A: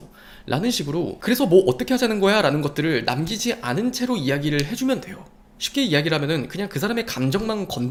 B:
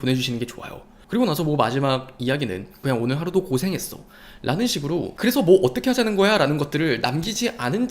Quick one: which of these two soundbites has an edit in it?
B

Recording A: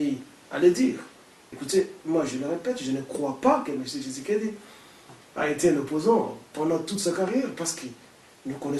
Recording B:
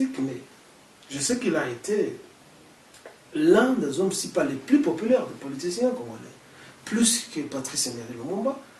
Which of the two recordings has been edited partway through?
A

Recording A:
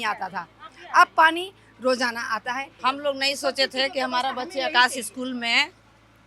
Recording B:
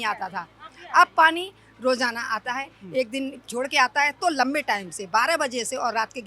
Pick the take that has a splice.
A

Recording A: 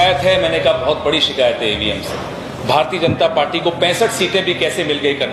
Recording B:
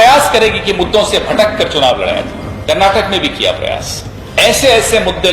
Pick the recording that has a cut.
B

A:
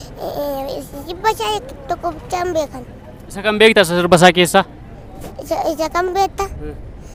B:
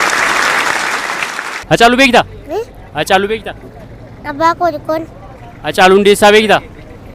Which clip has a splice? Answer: B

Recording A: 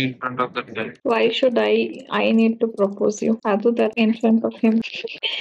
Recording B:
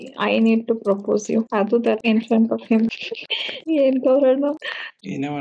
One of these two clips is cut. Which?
A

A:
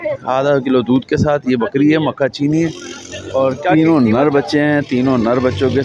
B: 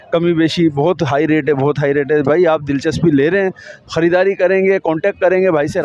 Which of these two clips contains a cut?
A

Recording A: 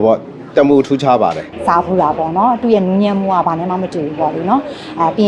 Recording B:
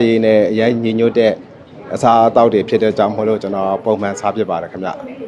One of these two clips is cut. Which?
A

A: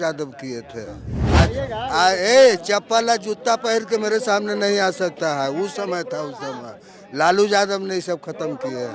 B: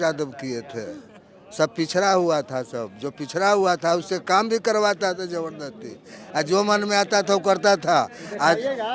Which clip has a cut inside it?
A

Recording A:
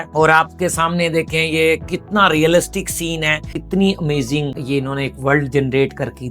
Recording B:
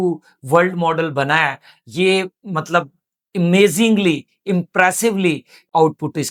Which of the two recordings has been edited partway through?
A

